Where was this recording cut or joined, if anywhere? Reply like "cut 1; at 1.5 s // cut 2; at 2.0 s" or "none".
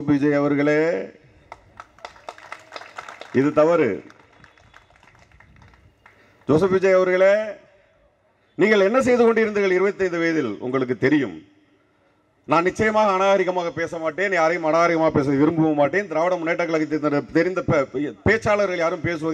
none